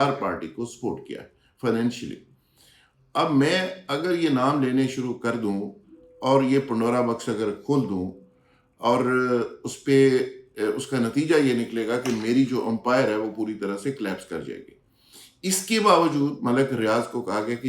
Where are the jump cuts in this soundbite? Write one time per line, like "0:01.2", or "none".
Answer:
none